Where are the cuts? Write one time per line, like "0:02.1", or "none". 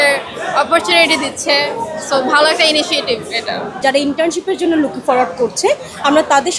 0:03.7